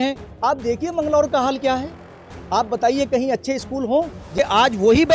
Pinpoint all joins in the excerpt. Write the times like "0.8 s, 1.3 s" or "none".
4.2 s